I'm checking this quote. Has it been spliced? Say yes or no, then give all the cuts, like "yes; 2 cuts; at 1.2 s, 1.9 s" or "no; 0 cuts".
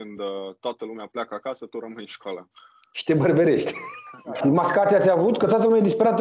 yes; 1 cut; at 4.4 s